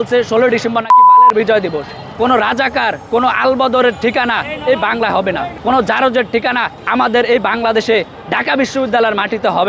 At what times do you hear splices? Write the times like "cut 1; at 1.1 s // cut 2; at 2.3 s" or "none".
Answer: cut 1; at 2.0 s // cut 2; at 3.0 s // cut 3; at 5.5 s // cut 4; at 6.7 s